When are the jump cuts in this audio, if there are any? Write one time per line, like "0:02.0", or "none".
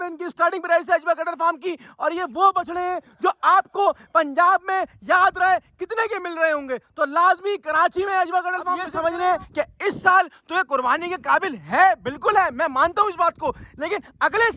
0:08.9